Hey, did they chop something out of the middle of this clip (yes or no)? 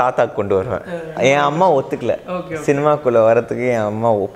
yes